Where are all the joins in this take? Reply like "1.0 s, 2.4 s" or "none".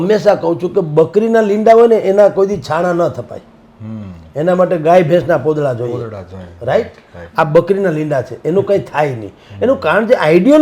none